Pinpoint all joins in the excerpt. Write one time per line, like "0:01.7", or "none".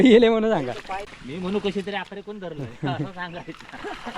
0:01.1